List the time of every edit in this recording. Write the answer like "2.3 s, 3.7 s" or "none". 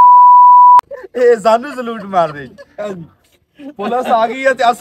1.0 s